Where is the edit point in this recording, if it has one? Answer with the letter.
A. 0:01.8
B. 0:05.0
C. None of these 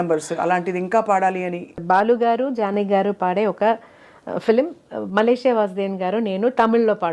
A